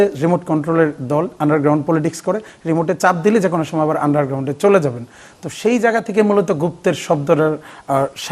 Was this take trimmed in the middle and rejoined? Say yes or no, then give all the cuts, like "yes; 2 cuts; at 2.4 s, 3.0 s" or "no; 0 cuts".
no; 0 cuts